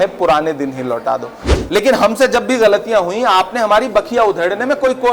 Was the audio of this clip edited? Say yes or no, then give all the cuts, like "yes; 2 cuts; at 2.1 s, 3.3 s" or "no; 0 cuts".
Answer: yes; 1 cut; at 1.5 s